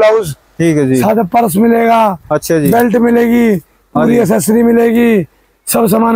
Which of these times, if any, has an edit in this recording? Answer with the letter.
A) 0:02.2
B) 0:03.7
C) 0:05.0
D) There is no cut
D